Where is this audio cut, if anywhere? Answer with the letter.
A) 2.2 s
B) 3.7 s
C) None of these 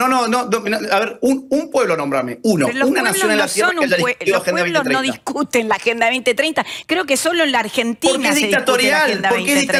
C